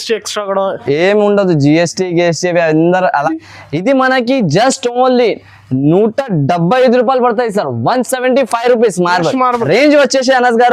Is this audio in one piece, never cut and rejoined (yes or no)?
no